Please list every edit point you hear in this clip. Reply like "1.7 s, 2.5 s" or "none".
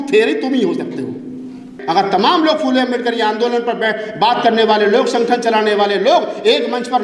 1.7 s